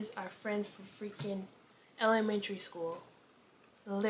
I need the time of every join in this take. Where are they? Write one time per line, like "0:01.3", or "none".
none